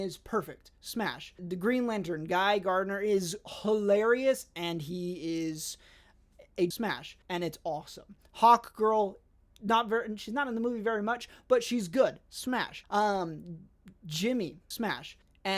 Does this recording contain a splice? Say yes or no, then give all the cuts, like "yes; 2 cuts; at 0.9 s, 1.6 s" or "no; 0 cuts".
no; 0 cuts